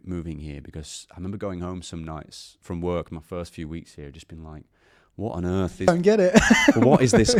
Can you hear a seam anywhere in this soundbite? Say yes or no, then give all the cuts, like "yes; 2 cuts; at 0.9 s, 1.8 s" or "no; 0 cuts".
no; 0 cuts